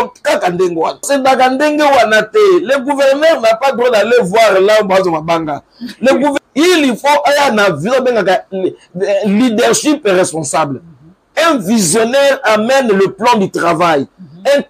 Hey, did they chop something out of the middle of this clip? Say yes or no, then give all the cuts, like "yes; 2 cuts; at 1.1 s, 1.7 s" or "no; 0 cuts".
yes; 2 cuts; at 1.1 s, 6.3 s